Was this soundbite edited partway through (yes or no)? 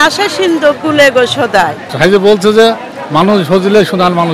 yes